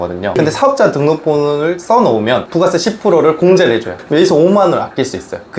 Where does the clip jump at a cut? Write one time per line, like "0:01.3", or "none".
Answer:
0:02.5
0:04.0